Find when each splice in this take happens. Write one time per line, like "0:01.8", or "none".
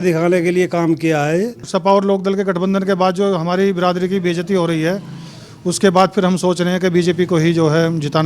0:01.7